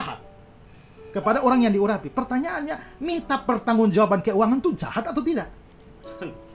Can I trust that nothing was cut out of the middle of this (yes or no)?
yes